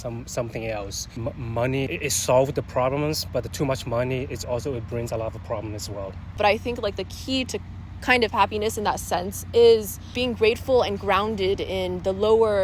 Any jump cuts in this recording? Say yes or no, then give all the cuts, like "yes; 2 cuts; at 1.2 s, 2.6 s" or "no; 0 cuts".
yes; 4 cuts; at 1.1 s, 1.9 s, 6.3 s, 10.1 s